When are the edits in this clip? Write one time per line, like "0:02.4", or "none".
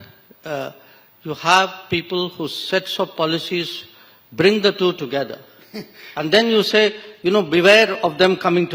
none